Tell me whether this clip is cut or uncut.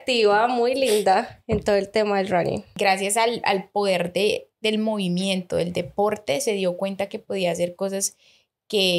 cut